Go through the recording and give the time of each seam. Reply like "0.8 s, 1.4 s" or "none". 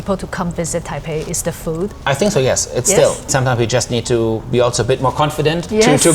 3.2 s